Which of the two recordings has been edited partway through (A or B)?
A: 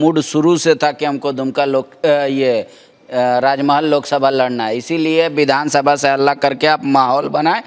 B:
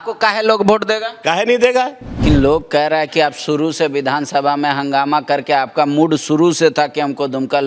B